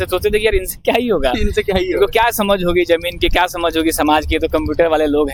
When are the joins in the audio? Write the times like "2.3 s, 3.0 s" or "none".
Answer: none